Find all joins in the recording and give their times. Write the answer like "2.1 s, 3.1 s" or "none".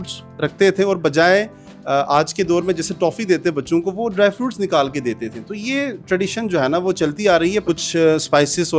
7.6 s